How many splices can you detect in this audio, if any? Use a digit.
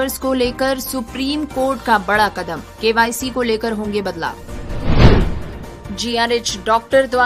0